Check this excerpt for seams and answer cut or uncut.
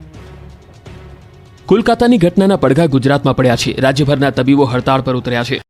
uncut